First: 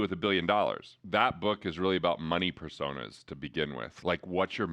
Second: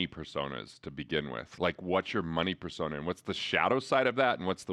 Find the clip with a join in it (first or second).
first